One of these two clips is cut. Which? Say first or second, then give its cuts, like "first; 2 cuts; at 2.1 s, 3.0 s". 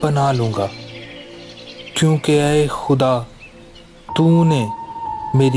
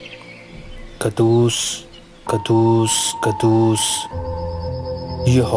second; 1 cut; at 0.9 s